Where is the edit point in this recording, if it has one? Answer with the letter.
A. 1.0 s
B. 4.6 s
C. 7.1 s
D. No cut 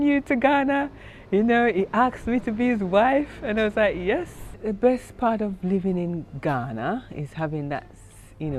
B